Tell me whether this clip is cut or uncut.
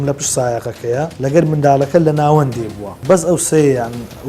cut